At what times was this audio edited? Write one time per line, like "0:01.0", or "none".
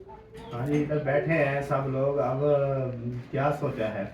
none